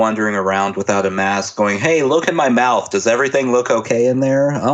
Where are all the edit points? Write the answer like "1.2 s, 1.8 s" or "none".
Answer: none